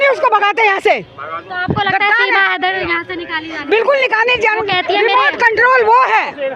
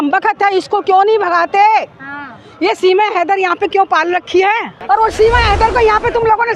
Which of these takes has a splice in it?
second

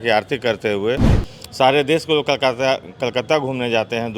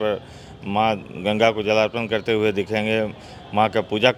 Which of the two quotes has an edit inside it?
first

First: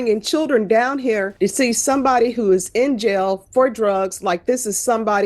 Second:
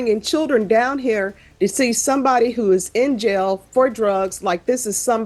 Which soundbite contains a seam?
first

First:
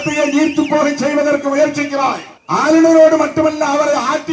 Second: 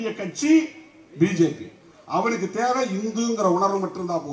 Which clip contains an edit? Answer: first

